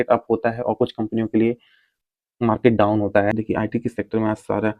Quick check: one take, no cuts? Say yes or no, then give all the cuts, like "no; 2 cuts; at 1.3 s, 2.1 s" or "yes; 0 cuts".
no; 1 cut; at 3.3 s